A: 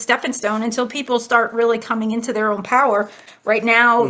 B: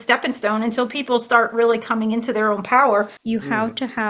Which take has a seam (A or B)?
B